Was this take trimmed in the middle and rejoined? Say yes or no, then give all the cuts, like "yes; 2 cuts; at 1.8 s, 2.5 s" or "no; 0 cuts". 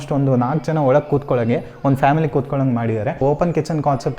yes; 1 cut; at 3.2 s